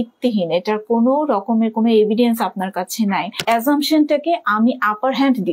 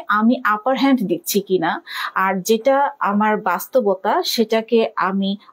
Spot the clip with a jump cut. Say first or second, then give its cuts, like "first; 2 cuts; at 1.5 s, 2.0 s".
first; 1 cut; at 3.4 s